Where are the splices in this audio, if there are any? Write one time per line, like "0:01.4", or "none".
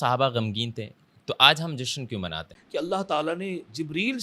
0:02.5